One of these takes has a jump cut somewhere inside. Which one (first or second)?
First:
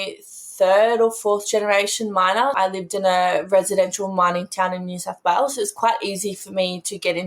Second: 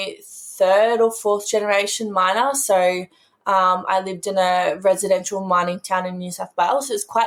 first